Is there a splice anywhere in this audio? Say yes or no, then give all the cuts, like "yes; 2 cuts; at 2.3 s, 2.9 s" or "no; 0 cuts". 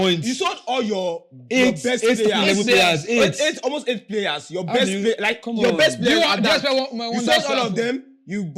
no; 0 cuts